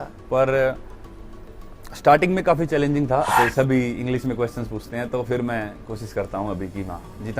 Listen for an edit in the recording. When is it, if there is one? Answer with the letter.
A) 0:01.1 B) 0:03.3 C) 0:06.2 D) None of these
B